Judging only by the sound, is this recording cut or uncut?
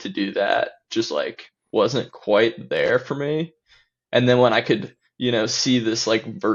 uncut